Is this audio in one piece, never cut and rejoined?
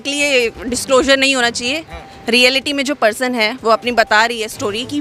yes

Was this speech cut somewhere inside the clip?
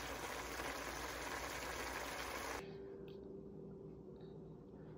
yes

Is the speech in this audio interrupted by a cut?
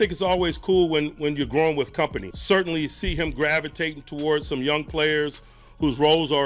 yes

